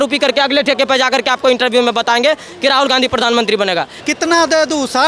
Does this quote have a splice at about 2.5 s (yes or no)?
no